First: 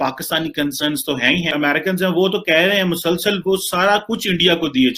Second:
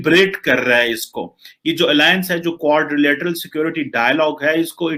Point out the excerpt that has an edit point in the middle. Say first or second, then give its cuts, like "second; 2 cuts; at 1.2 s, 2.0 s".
first; 1 cut; at 1.5 s